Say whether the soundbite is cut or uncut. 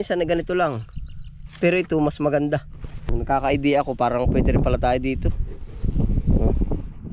cut